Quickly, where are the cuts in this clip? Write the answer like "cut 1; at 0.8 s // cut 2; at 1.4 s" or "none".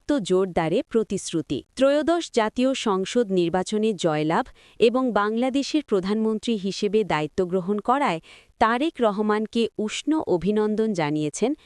cut 1; at 1.6 s